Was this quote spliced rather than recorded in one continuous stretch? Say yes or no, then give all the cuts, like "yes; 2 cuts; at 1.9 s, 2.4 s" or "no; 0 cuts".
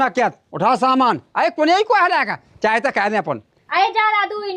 yes; 1 cut; at 3.5 s